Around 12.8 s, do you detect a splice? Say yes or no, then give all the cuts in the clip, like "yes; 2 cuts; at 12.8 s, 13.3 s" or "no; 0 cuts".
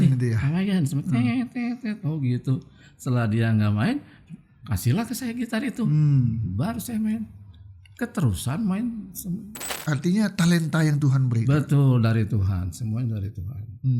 no; 1 cut; at 9.7 s